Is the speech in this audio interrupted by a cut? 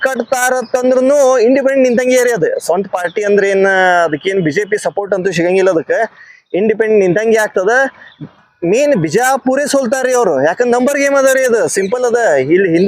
no; 0 cuts

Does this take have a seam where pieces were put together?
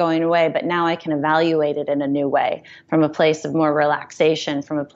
no; 0 cuts

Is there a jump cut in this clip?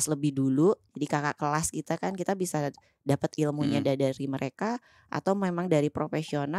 no; 0 cuts

